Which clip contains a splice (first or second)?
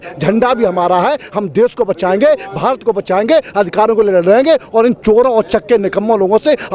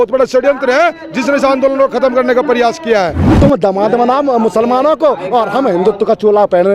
second